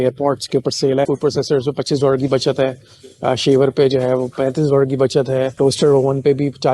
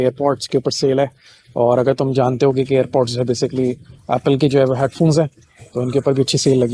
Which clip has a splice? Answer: first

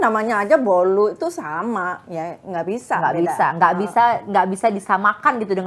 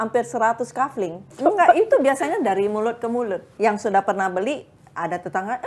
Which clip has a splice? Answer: second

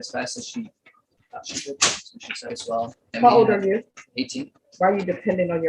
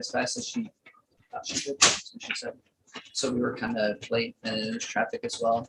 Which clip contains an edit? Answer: first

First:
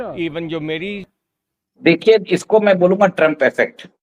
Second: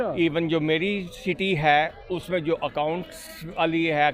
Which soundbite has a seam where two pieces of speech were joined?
first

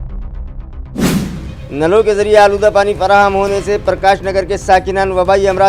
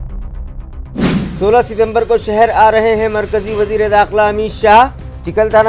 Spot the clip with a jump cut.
first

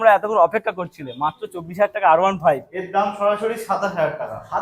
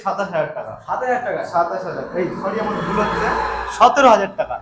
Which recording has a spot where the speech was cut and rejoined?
first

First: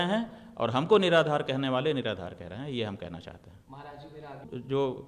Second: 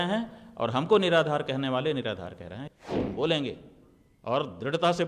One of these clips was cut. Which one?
second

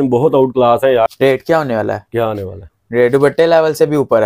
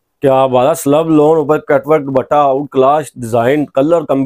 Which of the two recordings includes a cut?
first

